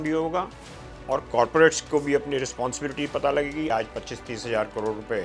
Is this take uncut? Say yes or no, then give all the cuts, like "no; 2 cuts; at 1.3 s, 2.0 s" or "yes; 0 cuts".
no; 1 cut; at 3.7 s